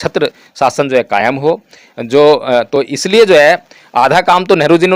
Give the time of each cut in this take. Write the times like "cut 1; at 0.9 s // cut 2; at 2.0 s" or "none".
none